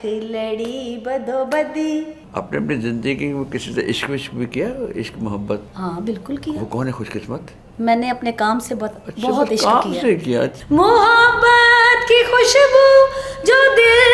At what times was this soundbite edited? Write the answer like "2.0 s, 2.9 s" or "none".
2.2 s, 5.7 s, 10.6 s